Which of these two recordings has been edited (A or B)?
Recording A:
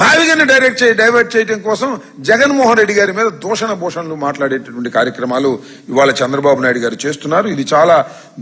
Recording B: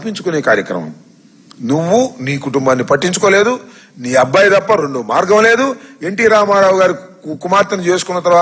A